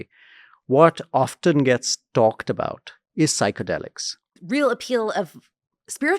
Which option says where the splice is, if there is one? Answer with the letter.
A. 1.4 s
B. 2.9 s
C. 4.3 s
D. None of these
C